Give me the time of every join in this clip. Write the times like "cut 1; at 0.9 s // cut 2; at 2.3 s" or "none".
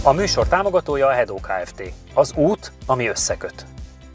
none